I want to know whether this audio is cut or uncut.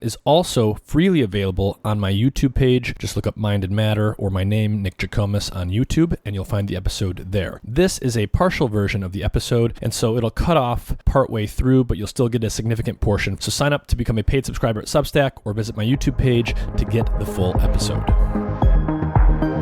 cut